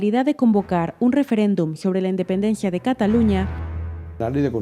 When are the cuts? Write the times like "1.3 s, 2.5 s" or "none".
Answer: 3.6 s